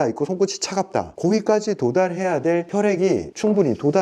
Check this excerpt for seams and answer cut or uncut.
cut